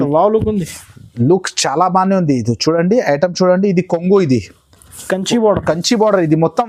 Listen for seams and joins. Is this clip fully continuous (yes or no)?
yes